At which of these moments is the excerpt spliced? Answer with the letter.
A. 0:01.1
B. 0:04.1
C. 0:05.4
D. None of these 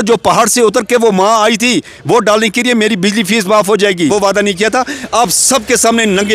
B